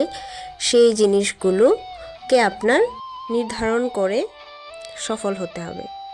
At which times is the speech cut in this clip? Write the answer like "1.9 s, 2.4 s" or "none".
none